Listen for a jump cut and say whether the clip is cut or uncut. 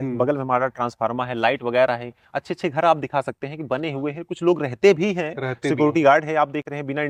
uncut